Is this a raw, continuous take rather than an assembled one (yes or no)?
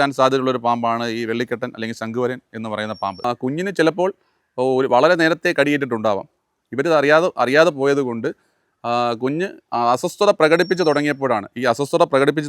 no